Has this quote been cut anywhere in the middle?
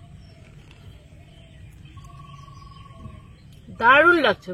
yes; 1 cut; at 3.5 s

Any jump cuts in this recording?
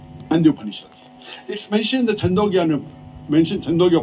no; 0 cuts

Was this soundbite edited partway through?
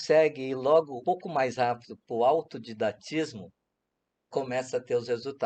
yes; 1 cut; at 0.9 s

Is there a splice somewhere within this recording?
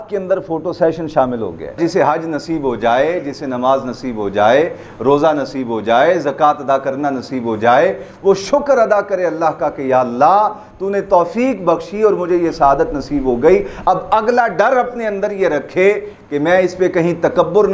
yes; 1 cut; at 1.8 s

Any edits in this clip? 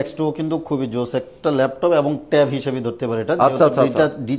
no; 0 cuts

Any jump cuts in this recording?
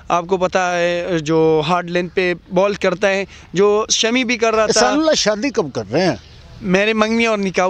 yes; 1 cut; at 4.7 s

